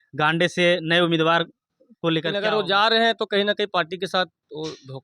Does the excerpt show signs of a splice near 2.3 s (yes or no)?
yes